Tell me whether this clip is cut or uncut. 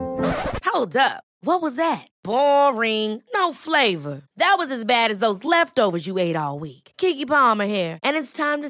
uncut